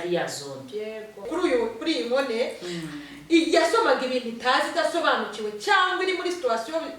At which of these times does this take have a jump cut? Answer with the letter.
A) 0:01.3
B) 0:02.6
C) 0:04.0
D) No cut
A